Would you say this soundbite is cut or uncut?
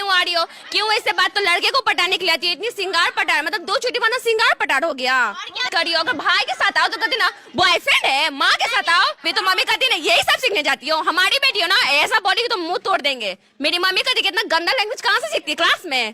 cut